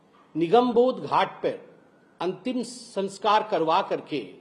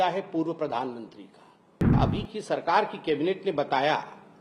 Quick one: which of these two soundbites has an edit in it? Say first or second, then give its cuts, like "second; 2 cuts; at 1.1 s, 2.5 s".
second; 1 cut; at 2.0 s